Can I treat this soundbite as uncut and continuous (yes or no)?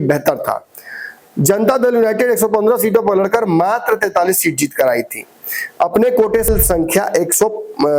no